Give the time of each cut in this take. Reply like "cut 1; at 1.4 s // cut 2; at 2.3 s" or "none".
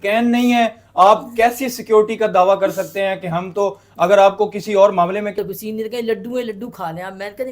cut 1; at 5.3 s